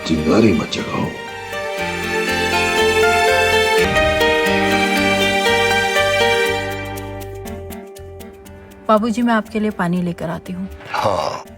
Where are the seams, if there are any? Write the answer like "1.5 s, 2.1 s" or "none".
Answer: 3.8 s